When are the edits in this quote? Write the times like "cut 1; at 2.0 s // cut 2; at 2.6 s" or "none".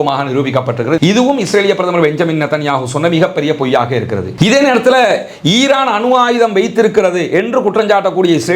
cut 1; at 4.3 s